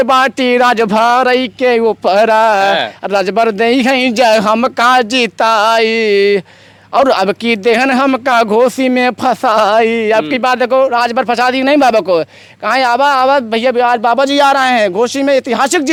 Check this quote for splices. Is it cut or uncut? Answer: uncut